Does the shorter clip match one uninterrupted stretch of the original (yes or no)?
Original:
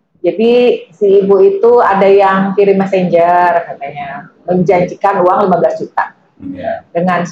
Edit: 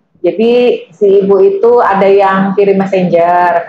yes